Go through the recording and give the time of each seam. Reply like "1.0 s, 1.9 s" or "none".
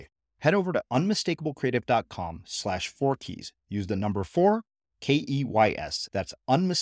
none